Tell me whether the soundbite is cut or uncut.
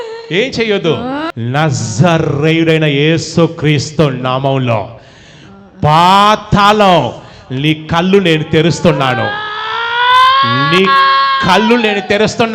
cut